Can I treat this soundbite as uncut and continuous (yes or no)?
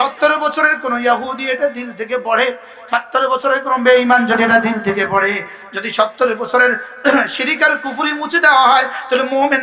yes